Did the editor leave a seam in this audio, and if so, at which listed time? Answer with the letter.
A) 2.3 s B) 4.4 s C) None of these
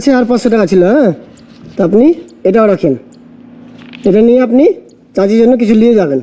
C